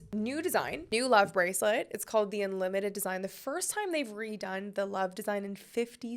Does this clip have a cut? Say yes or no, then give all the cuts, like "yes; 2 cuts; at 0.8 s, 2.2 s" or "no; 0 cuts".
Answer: no; 0 cuts